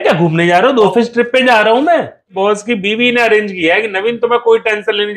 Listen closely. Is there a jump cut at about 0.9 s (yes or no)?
yes